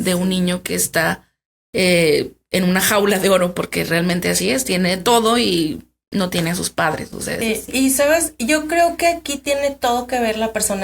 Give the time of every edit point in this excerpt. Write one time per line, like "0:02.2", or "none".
0:07.4